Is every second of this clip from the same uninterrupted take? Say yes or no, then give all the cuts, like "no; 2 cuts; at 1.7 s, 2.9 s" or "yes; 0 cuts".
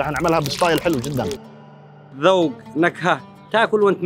no; 1 cut; at 2.0 s